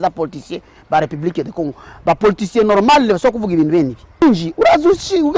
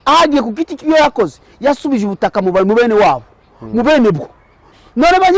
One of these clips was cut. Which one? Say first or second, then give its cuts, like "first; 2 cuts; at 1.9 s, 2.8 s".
first; 1 cut; at 4.2 s